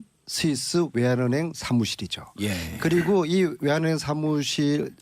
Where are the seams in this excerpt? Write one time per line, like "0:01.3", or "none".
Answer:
0:02.4